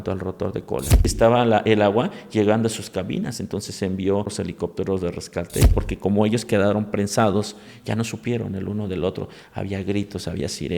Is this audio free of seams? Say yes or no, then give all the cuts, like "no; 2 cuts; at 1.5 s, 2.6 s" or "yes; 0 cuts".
no; 3 cuts; at 1.1 s, 4.3 s, 5.7 s